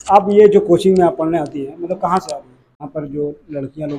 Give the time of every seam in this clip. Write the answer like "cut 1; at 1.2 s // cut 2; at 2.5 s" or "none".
cut 1; at 2.8 s

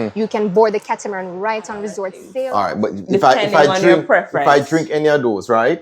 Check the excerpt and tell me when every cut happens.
cut 1; at 2.2 s

